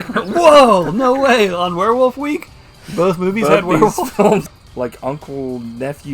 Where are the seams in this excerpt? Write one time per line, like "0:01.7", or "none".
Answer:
0:04.5